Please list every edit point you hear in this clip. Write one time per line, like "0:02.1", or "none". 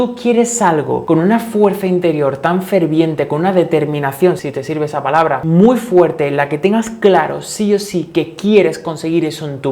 0:01.0
0:04.4